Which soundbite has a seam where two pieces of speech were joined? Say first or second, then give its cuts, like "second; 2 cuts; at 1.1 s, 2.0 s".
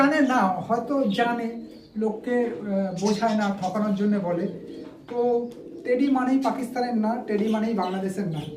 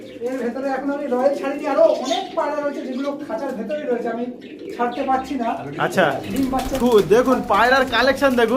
second; 1 cut; at 6.8 s